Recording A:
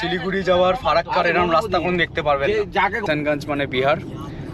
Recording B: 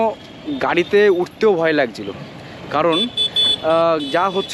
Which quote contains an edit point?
A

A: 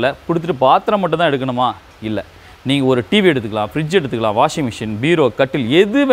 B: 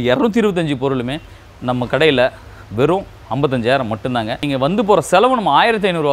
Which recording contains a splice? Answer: B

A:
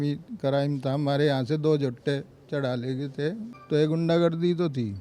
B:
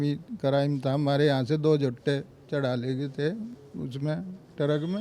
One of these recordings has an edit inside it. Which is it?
A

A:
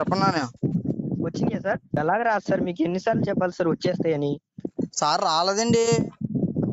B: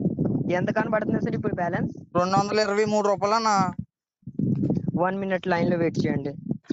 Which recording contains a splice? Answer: A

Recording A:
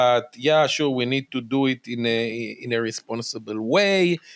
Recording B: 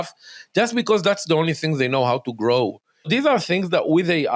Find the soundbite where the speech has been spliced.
B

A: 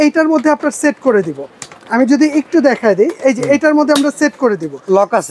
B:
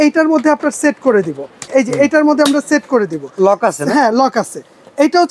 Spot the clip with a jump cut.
B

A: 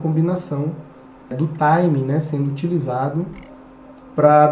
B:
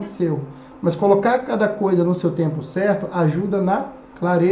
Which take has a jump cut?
A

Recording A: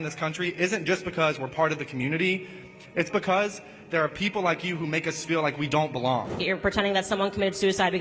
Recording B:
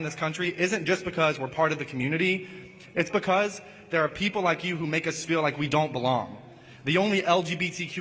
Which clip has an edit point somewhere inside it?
A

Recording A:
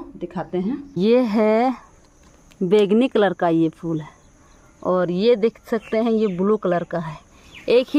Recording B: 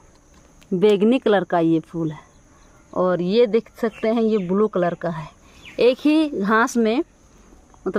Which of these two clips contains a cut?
A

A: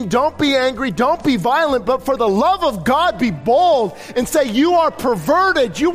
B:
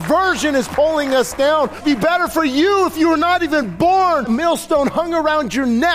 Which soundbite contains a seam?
B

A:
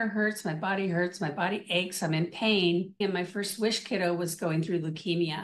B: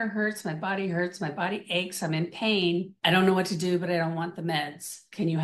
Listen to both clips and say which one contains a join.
A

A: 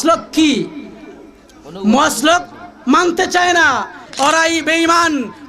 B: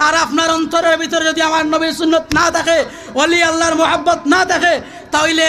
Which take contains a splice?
A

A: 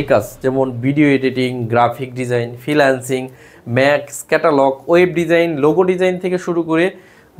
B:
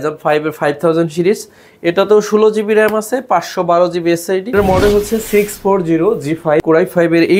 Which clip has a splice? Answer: B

